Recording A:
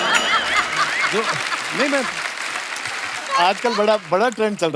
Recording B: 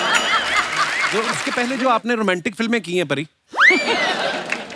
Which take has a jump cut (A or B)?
B